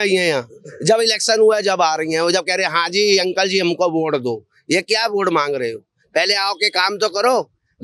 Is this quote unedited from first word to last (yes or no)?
yes